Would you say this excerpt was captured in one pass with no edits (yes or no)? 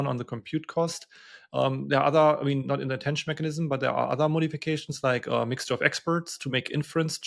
yes